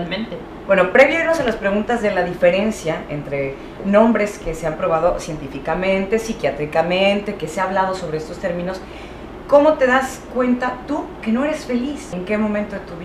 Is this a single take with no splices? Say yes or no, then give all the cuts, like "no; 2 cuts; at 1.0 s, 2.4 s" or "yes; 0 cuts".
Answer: no; 1 cut; at 4.6 s